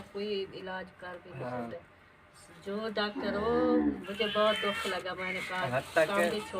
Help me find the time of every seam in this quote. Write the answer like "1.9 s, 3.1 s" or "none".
4.0 s